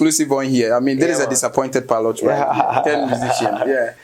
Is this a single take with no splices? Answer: yes; 0 cuts

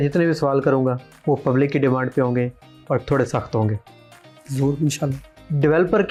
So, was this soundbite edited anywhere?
no; 0 cuts

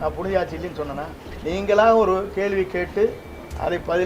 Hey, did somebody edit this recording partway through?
yes; 1 cut; at 1.2 s

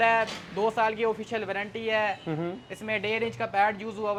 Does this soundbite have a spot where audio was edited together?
no; 0 cuts

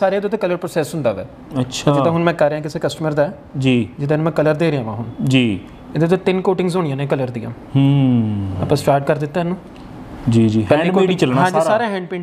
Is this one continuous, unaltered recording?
yes; 0 cuts

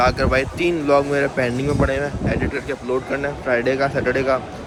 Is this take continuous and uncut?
yes; 0 cuts

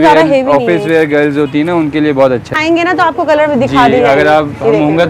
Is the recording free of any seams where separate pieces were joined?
no; 1 cut; at 2.5 s

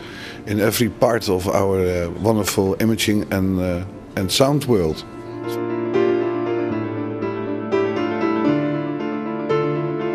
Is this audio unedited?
no; 1 cut; at 5.3 s

